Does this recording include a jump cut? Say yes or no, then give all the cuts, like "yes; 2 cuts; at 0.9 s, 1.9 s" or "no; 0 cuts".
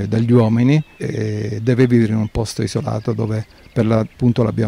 yes; 1 cut; at 1.0 s